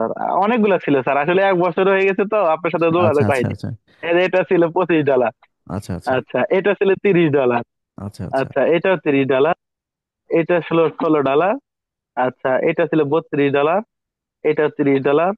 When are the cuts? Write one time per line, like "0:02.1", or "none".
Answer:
none